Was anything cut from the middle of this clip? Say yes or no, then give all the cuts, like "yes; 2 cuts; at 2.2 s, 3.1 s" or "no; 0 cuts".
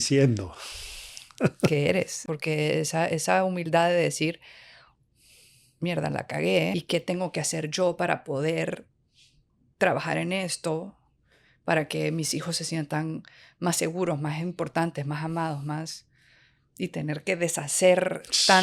yes; 2 cuts; at 2.2 s, 6.7 s